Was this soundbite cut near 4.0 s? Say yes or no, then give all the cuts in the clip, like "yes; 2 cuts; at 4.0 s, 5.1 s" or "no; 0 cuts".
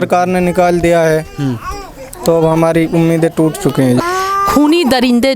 yes; 1 cut; at 4.0 s